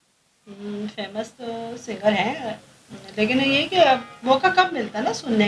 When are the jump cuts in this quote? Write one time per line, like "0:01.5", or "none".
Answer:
none